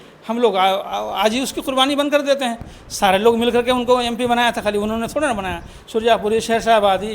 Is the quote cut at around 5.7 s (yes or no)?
no